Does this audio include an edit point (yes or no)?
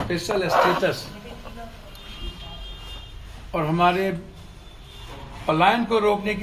no